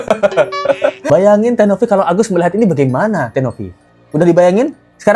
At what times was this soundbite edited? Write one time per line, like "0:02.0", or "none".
0:01.0